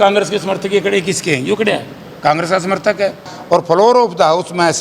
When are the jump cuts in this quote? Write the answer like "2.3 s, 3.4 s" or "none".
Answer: 3.3 s